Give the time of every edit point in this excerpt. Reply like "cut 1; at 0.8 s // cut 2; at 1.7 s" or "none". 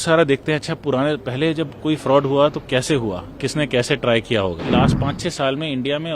cut 1; at 4.7 s